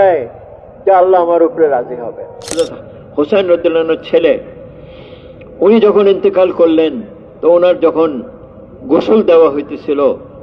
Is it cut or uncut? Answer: cut